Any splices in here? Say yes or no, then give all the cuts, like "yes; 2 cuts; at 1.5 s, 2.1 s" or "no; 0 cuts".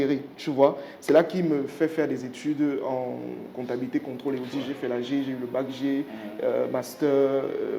no; 0 cuts